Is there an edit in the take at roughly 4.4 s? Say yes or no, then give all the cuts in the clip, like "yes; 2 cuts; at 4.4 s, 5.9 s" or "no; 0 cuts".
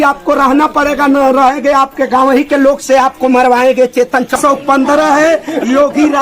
yes; 1 cut; at 4.4 s